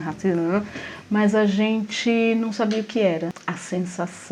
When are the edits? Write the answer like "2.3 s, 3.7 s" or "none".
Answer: none